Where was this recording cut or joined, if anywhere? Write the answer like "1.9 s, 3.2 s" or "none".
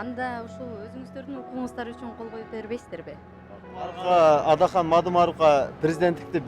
4.0 s